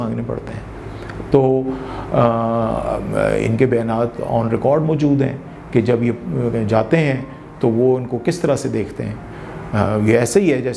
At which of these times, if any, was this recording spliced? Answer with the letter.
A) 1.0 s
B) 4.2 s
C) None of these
C